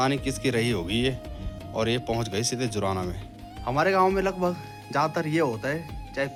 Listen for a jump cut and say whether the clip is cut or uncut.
uncut